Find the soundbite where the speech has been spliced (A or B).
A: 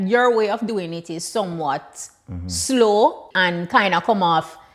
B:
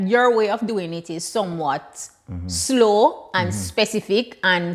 A